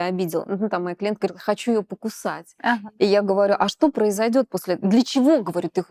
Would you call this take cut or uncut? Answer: uncut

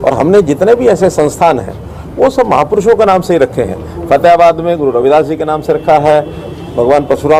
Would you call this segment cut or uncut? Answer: uncut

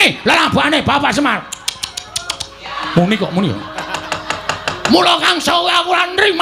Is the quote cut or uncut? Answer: uncut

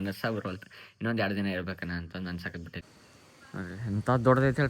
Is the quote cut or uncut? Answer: cut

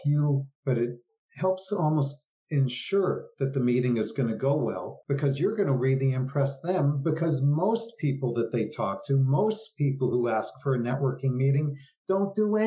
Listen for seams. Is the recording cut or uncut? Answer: uncut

